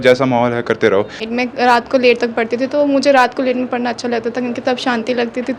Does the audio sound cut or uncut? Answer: cut